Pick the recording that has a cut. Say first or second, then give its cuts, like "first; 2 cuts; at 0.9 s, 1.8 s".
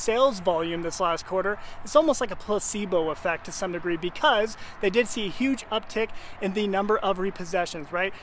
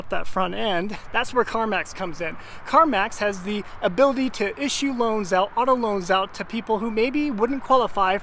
second; 1 cut; at 1.0 s